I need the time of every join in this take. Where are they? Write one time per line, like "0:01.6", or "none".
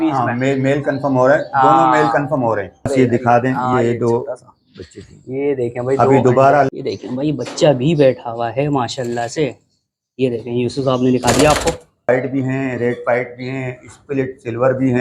0:02.9
0:06.7
0:12.1